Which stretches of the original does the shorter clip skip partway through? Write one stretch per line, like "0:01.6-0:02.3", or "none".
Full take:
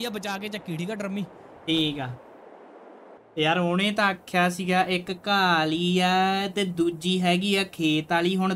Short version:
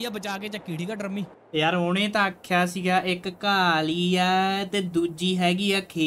0:01.4-0:03.2